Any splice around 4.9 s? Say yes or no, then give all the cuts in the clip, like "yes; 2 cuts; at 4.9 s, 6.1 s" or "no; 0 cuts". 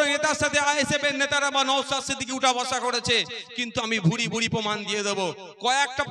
no; 0 cuts